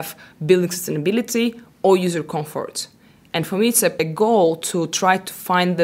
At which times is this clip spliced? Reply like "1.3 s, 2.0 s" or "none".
4.0 s